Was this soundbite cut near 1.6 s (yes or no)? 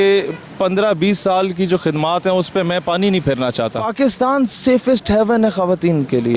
no